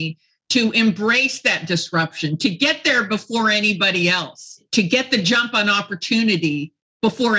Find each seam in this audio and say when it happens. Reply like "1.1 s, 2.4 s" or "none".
4.7 s

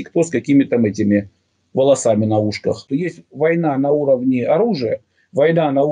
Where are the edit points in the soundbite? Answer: 2.8 s

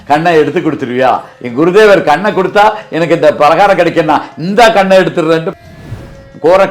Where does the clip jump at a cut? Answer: 1.3 s, 5.7 s

